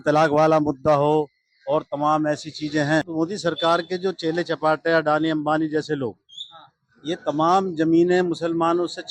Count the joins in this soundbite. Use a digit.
1